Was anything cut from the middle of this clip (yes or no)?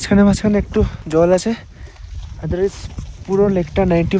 yes